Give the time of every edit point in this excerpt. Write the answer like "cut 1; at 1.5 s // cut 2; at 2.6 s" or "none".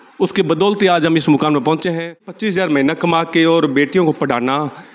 cut 1; at 2.3 s